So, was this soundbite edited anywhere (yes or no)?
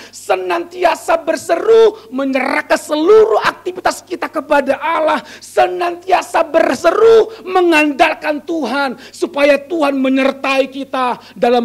no